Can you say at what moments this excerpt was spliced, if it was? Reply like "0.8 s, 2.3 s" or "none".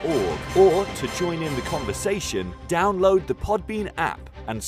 none